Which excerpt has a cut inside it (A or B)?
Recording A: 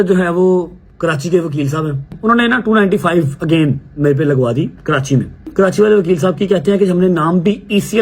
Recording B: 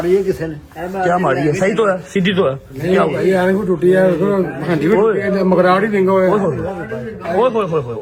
A